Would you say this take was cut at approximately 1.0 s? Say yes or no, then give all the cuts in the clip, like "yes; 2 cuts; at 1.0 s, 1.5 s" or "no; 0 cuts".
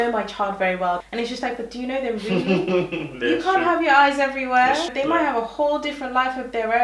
yes; 2 cuts; at 1.0 s, 4.9 s